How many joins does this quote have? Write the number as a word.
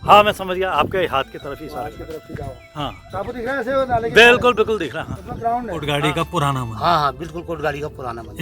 one